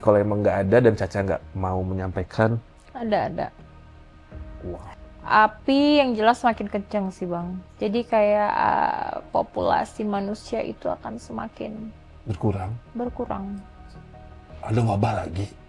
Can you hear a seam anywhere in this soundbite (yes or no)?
no